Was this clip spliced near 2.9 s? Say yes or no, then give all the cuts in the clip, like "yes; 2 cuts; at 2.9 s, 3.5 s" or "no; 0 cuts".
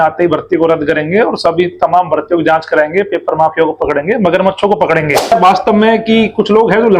no; 1 cut; at 5.3 s